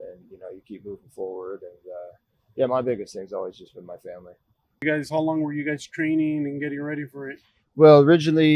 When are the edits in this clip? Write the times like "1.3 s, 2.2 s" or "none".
4.8 s